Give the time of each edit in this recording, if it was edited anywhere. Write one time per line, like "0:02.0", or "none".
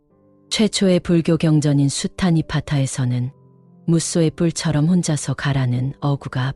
none